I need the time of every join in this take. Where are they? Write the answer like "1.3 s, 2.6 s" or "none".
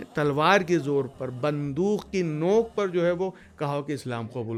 none

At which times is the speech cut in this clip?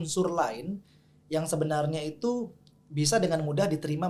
none

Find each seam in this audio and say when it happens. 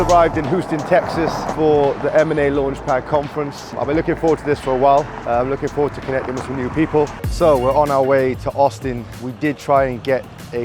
1.5 s, 3.7 s, 5.2 s, 7.2 s, 9.2 s

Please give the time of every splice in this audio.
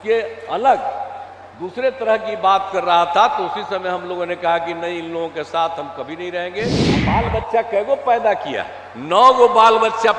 7.0 s

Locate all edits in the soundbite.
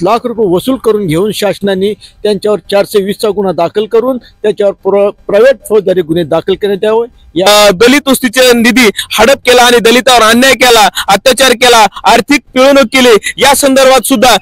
7.5 s

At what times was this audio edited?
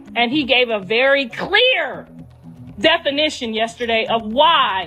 none

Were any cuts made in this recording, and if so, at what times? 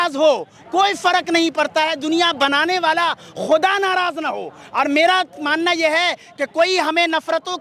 none

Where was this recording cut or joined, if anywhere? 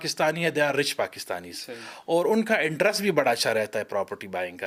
none

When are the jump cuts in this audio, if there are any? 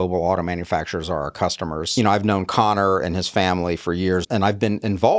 1.9 s, 4.3 s

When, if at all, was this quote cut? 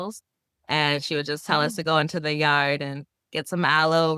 none

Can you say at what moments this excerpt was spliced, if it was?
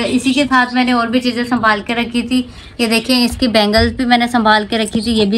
none

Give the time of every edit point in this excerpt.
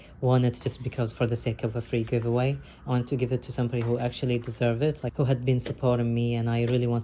none

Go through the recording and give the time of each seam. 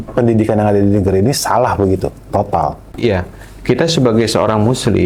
none

